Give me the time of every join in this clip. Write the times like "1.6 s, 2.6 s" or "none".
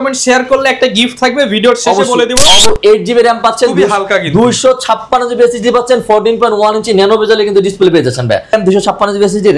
2.7 s, 8.5 s